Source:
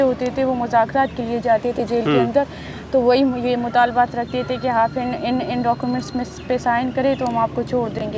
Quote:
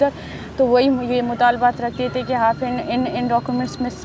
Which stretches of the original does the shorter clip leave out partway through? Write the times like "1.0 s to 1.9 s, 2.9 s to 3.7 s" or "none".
none